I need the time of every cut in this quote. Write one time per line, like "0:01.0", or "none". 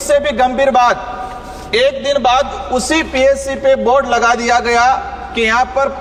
none